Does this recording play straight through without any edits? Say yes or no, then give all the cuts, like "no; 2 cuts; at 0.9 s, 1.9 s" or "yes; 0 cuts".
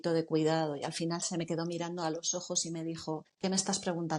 no; 1 cut; at 3.3 s